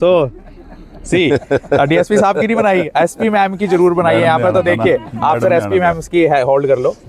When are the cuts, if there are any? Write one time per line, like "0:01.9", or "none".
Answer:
none